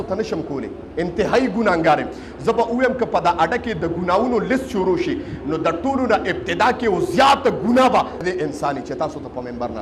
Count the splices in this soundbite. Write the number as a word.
one